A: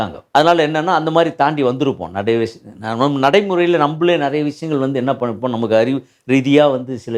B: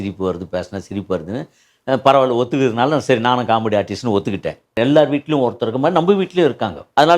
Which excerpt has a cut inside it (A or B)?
B